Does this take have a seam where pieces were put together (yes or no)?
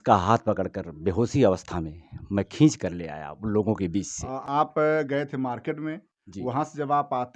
no